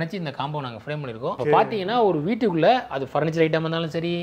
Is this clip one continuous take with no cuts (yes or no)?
no